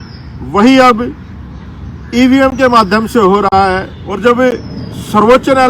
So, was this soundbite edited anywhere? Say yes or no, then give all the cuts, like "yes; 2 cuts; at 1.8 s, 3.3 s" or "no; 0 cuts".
yes; 1 cut; at 4.0 s